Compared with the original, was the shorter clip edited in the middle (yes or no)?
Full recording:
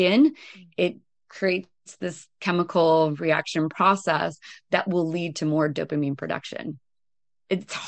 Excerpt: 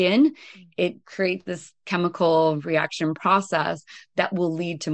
yes